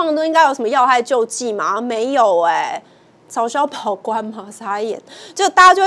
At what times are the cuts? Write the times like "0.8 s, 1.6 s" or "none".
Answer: none